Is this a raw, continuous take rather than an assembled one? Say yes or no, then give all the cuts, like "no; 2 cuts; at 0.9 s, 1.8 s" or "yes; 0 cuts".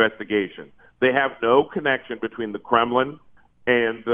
yes; 0 cuts